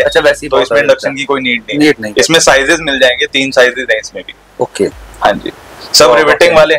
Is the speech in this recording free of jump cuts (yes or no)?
yes